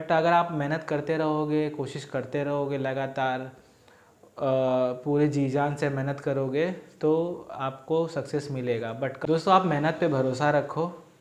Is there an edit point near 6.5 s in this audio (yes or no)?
no